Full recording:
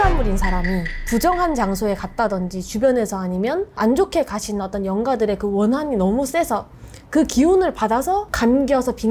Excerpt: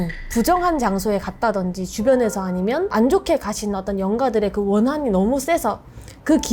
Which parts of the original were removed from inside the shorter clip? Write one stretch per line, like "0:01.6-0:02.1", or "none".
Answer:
0:03.6-0:03.7

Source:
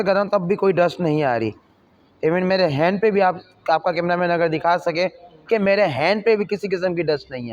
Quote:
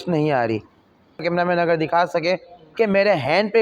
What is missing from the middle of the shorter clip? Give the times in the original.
0:02.1-0:03.9

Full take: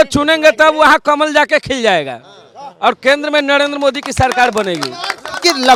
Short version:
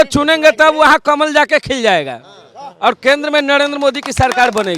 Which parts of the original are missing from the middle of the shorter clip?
none

